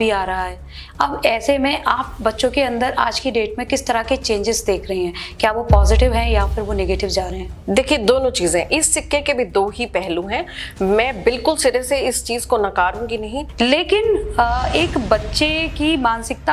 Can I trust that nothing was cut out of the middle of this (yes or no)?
no